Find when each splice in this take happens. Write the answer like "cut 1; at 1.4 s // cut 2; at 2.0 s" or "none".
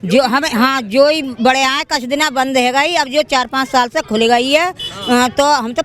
none